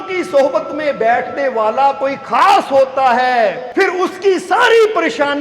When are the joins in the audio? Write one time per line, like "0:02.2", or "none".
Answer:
0:03.6